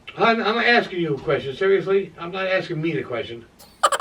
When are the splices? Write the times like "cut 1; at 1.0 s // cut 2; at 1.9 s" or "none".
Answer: none